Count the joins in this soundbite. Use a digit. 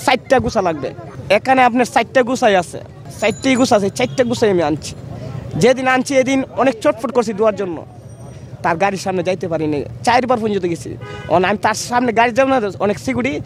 0